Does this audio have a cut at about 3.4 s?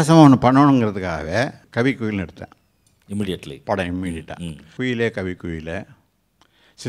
no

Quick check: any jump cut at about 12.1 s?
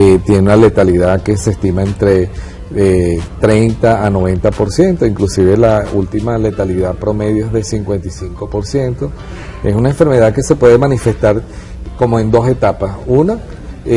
yes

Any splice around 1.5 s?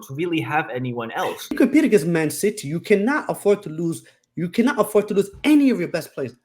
yes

